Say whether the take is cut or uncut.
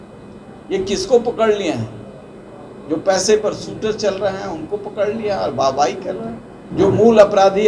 cut